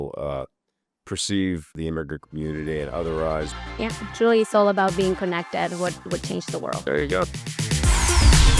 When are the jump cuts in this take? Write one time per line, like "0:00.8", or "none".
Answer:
0:01.7
0:03.7
0:07.5